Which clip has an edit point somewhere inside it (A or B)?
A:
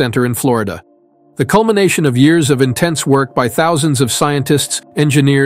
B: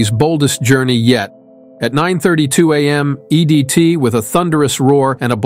B